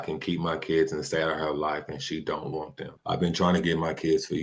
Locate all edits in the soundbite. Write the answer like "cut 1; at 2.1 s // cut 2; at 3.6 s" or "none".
cut 1; at 2.9 s